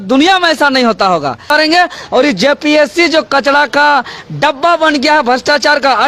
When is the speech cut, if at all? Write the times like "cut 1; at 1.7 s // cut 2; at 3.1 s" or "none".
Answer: cut 1; at 1.5 s